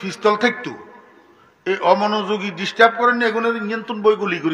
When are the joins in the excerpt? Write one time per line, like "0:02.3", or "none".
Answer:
none